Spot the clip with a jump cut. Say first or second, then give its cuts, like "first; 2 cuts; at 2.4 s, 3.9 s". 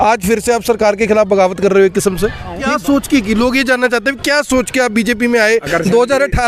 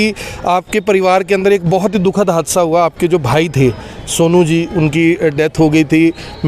first; 1 cut; at 2.7 s